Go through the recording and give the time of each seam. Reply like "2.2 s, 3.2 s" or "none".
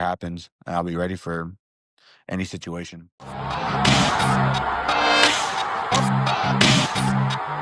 2.9 s